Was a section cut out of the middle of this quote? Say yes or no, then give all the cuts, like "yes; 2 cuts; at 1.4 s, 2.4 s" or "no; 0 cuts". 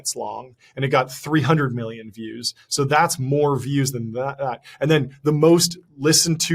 no; 0 cuts